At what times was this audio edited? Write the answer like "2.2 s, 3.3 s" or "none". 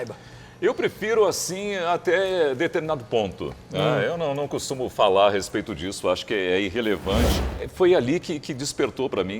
7.4 s